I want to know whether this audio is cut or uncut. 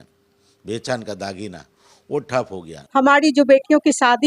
cut